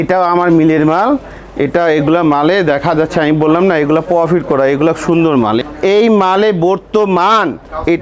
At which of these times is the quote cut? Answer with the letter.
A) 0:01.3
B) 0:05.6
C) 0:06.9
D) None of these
B